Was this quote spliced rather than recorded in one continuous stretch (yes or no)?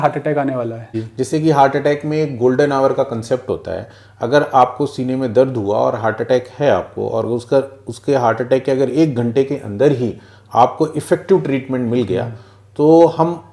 yes